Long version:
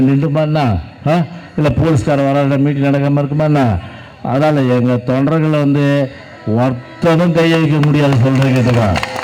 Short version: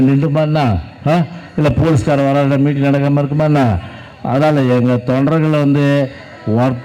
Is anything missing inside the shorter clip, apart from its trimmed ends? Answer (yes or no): no